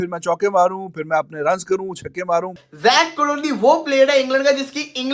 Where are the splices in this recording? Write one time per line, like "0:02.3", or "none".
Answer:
0:02.6